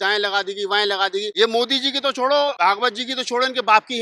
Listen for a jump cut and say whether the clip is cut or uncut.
cut